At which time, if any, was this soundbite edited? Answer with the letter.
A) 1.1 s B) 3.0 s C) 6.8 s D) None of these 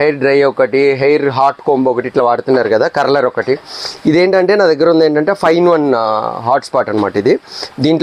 D